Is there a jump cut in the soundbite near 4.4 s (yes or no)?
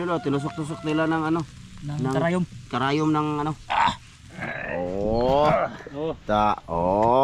yes